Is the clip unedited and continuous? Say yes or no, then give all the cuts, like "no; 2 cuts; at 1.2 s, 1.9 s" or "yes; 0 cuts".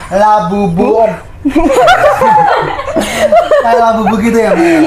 yes; 0 cuts